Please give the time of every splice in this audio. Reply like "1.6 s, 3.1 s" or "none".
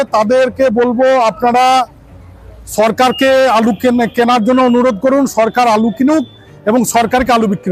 none